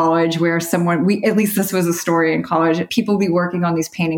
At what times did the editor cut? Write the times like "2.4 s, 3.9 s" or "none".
1.5 s, 2.9 s